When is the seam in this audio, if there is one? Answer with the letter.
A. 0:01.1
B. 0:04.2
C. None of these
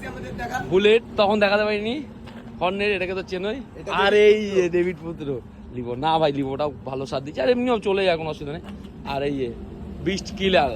C